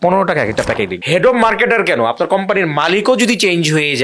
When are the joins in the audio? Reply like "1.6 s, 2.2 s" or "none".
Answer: 1.0 s